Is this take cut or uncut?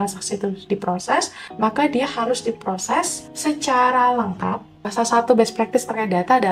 cut